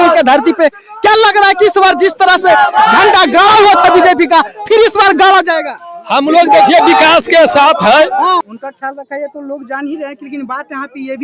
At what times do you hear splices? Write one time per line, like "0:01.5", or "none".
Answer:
0:08.5